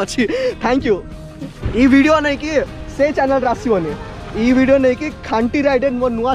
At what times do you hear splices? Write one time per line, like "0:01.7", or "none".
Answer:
0:01.6